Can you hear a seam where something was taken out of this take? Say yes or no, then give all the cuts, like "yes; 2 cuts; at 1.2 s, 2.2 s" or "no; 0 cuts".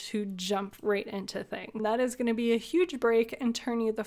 yes; 1 cut; at 1.8 s